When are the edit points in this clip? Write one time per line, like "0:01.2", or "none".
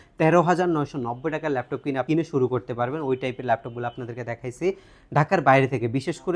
none

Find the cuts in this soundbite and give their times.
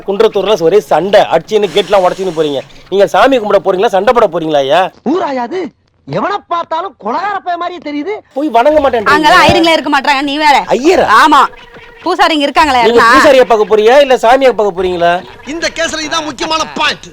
0:08.3

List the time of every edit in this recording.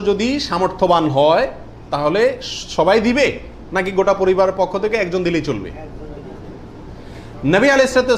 none

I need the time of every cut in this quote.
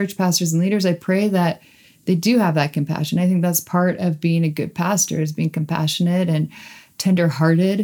none

